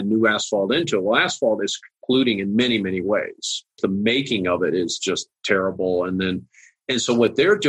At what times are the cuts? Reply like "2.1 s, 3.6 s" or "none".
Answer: 3.8 s